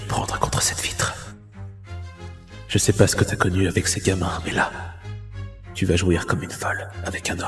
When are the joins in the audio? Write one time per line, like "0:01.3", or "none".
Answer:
none